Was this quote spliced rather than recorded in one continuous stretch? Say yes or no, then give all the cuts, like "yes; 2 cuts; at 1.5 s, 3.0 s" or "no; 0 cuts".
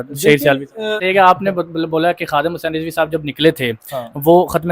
yes; 1 cut; at 1.0 s